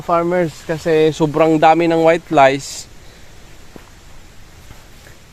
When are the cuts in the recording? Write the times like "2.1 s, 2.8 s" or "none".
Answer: none

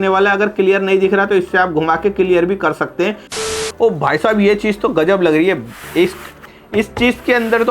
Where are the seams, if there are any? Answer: 3.3 s

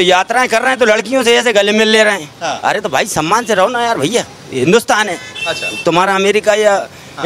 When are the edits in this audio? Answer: none

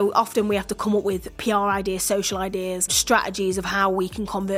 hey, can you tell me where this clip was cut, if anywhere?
1.3 s, 3.0 s

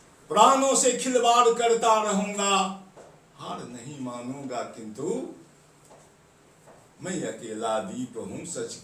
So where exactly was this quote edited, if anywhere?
none

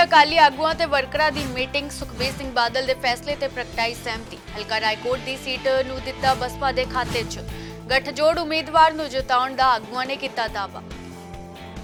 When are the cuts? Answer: none

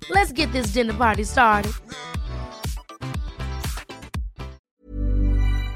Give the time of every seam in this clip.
4.6 s

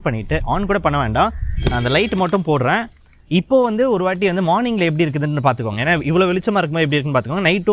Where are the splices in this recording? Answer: none

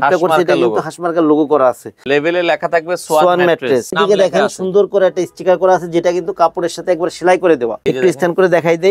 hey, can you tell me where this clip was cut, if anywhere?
2.0 s, 3.9 s, 7.8 s

